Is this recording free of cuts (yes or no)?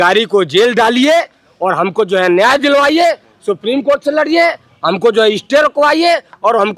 yes